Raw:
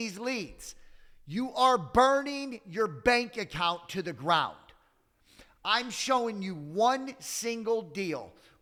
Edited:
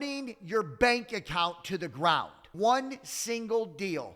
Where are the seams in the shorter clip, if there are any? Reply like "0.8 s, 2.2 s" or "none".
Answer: 2.4 s